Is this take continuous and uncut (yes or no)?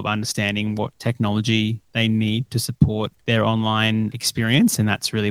no